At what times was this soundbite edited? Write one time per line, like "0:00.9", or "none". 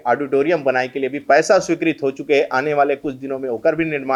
none